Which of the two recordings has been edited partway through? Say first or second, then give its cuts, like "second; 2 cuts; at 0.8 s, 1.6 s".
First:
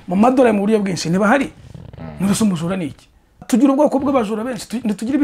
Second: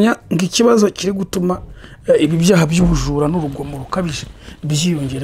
first; 1 cut; at 3.4 s